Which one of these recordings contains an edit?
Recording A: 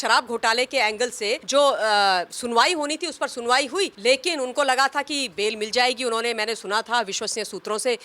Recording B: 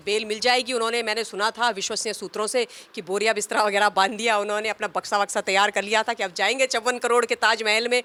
A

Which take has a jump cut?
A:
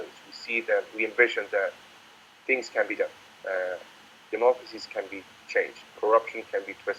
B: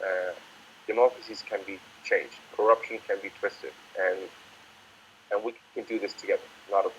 B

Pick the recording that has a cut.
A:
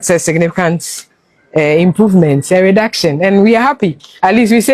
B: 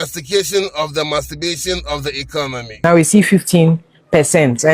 B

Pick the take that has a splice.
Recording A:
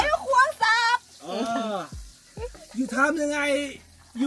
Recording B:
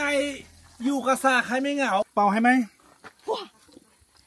B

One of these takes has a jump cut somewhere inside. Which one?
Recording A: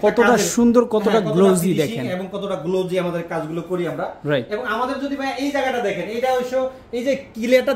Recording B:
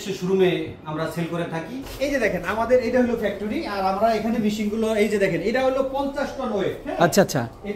B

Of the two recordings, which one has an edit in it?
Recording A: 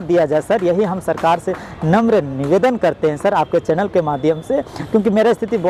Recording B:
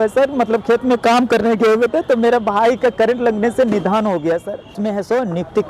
B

